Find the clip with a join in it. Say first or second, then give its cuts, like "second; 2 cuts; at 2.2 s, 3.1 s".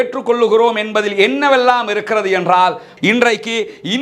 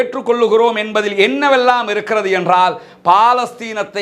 first; 1 cut; at 2.9 s